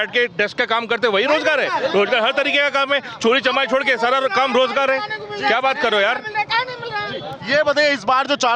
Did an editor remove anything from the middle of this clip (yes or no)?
no